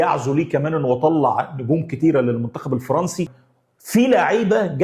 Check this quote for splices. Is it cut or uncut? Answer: cut